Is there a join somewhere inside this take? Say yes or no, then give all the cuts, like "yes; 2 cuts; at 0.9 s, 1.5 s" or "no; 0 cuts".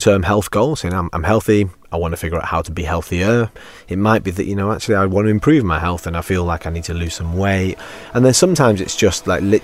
yes; 2 cuts; at 3.6 s, 7.9 s